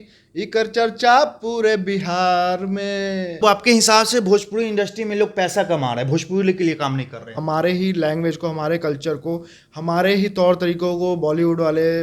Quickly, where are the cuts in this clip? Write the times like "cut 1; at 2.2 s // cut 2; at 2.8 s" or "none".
cut 1; at 3.4 s // cut 2; at 7.4 s